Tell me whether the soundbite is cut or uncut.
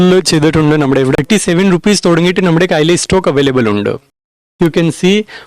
cut